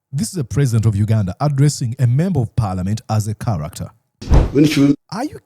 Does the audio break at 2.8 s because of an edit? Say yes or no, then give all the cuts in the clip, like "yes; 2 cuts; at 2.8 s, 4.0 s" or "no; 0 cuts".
no; 1 cut; at 4.4 s